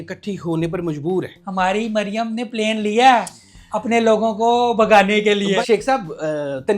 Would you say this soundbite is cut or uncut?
cut